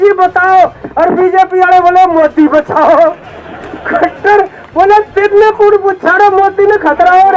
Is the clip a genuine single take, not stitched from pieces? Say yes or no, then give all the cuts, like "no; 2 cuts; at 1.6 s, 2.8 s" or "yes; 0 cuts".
yes; 0 cuts